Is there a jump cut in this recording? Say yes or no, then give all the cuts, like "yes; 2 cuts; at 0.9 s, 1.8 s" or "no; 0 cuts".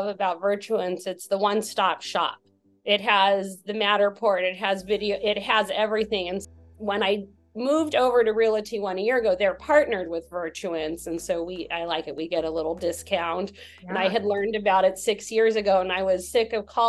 yes; 1 cut; at 6.4 s